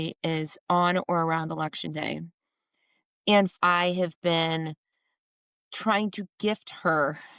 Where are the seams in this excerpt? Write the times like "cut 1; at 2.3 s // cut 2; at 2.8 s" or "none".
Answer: cut 1; at 3.5 s